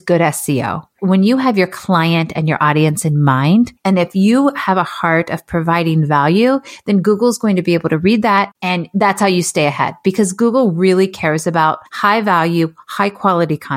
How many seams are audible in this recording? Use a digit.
3